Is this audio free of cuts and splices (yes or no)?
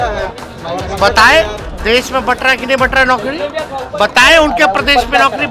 yes